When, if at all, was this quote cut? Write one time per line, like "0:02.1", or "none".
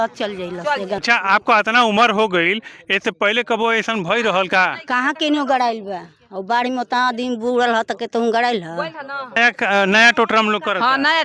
0:01.0
0:09.4